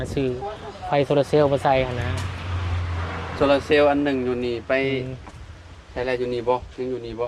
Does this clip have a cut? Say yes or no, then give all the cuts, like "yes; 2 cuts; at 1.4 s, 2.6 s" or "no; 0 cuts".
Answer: no; 0 cuts